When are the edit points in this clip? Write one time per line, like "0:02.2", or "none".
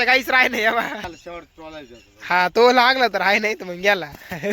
0:01.1